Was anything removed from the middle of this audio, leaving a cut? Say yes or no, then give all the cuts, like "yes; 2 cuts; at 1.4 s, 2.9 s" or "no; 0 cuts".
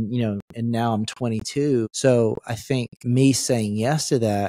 yes; 2 cuts; at 1.9 s, 2.9 s